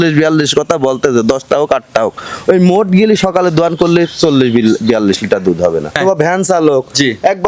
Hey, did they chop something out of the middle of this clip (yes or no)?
yes